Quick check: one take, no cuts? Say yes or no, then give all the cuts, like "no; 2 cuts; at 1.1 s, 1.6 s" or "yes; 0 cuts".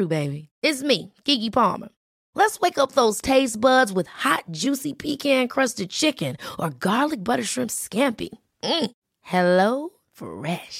yes; 0 cuts